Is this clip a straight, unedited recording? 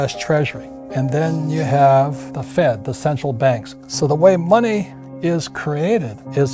no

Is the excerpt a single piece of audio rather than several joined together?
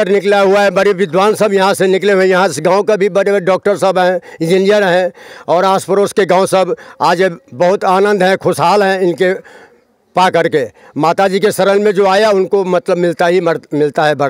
yes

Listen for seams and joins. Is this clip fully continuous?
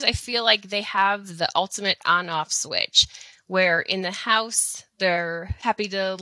yes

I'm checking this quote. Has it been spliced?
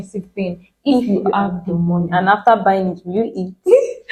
no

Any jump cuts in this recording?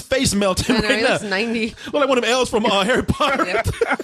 yes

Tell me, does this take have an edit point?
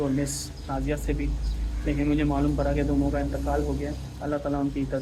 no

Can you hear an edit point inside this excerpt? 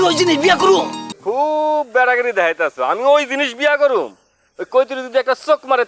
yes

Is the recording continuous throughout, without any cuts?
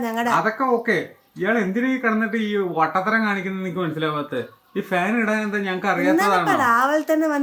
yes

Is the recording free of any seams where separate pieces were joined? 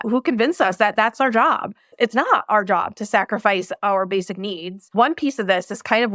no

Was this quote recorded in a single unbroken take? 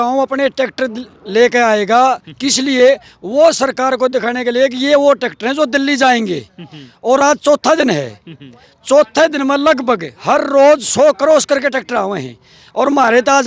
yes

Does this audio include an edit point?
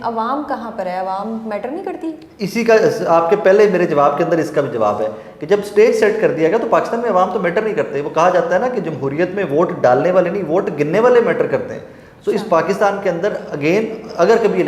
no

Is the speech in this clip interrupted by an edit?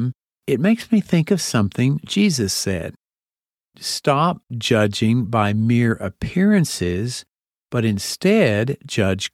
yes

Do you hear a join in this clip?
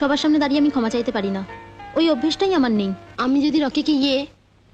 yes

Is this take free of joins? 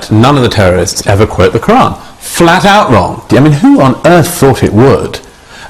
no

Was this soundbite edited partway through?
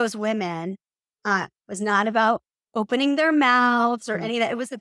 no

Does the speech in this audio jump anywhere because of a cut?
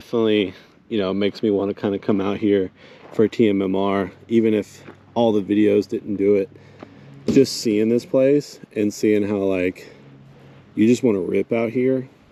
no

